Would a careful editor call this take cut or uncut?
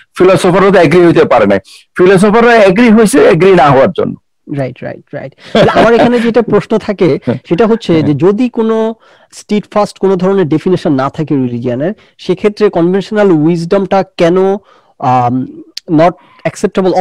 uncut